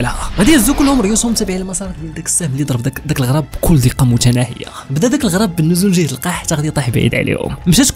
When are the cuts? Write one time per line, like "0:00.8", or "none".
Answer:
none